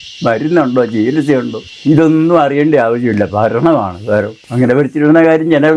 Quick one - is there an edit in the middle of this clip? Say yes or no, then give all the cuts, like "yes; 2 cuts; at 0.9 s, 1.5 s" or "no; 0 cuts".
yes; 2 cuts; at 1.6 s, 4.4 s